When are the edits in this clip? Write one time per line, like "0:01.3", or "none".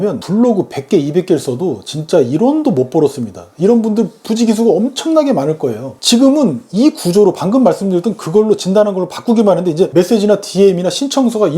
none